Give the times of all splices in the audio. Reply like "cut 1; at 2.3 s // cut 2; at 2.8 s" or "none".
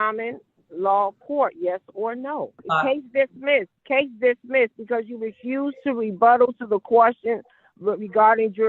cut 1; at 2.6 s // cut 2; at 3.8 s